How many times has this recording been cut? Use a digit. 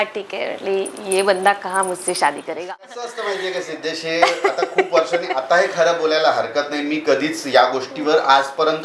1